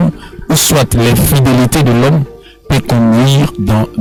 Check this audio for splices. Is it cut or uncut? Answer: uncut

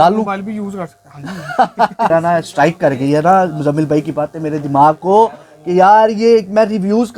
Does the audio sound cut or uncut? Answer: cut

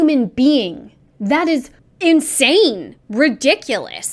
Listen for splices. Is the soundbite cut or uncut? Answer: cut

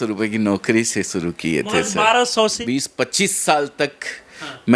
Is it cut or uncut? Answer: cut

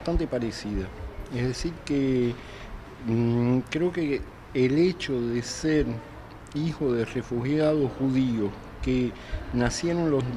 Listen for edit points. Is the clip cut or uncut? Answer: cut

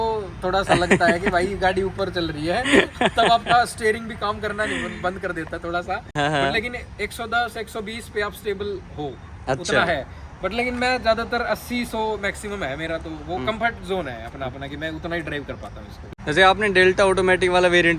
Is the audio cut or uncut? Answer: uncut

